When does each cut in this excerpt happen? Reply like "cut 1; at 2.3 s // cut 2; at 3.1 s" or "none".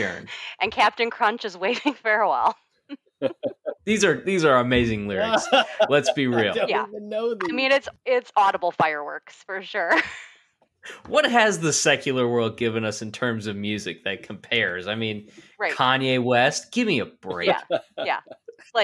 cut 1; at 7.9 s